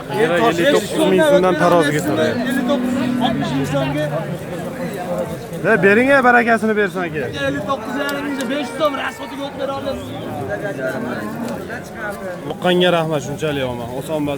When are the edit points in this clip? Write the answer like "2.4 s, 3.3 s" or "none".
12.6 s